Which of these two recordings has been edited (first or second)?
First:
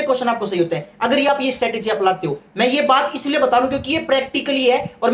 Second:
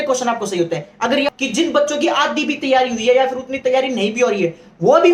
second